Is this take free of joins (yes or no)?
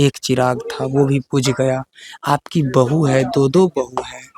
yes